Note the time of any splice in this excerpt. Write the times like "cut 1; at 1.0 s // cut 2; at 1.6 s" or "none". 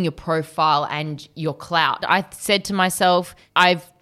cut 1; at 2.0 s